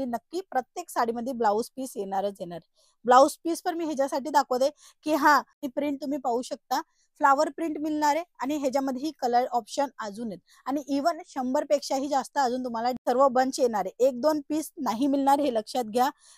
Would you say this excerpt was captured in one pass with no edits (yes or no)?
no